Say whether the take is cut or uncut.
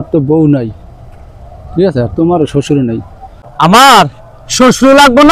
cut